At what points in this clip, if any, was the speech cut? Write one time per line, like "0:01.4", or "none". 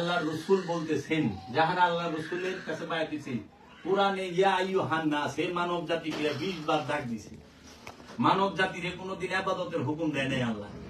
none